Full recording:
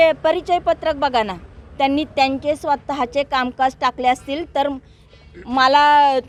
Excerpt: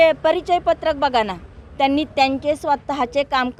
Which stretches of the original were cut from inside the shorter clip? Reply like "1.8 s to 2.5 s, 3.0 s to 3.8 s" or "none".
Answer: none